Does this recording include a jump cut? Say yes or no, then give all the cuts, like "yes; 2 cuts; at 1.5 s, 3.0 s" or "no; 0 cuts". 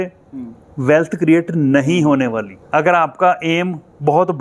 yes; 1 cut; at 2.5 s